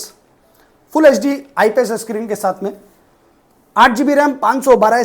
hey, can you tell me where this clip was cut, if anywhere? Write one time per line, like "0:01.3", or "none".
none